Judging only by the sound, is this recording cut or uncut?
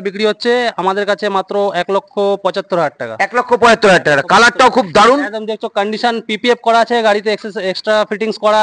uncut